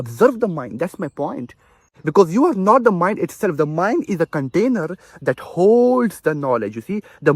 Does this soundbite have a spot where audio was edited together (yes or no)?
yes